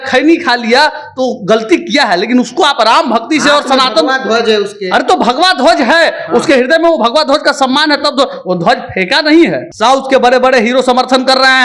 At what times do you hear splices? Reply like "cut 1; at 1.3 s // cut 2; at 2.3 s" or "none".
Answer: cut 1; at 9.7 s